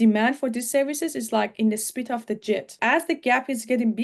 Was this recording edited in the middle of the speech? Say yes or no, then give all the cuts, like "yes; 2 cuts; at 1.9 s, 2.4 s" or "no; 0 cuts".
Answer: yes; 1 cut; at 2.7 s